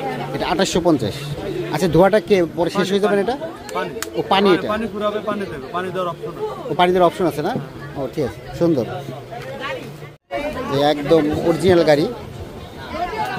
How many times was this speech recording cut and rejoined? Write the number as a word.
one